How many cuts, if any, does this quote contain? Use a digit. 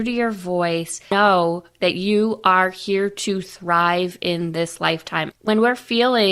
2